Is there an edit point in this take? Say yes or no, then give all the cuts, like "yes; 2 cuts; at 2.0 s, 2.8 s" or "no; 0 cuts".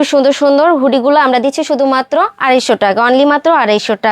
no; 0 cuts